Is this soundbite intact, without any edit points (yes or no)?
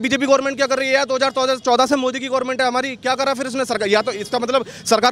yes